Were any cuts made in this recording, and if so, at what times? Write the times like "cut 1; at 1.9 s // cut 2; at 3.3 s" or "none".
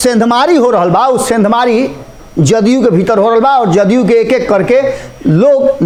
none